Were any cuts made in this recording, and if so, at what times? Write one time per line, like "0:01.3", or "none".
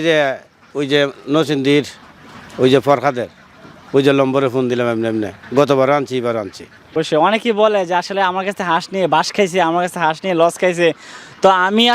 0:06.9